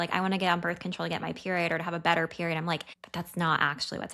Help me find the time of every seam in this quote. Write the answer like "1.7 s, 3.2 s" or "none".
3.0 s